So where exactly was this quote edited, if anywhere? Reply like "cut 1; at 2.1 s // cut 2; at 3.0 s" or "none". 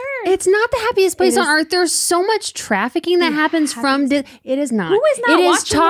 none